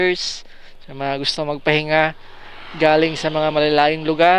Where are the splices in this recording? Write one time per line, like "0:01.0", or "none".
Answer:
none